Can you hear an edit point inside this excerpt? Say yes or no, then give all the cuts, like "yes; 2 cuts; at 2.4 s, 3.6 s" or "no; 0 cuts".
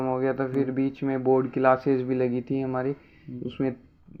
no; 0 cuts